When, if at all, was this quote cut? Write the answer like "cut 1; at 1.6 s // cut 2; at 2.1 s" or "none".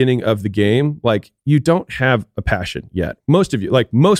none